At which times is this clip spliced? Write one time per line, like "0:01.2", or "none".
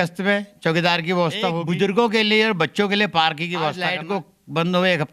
0:01.6
0:03.8